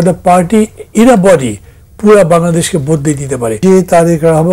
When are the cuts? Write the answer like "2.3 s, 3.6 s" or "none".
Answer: 3.6 s